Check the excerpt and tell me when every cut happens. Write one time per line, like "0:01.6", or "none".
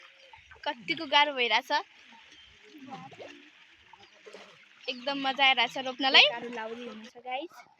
0:06.3